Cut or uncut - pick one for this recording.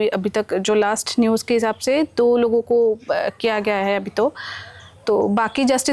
uncut